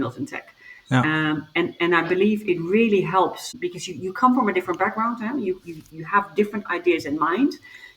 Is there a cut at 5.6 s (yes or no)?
no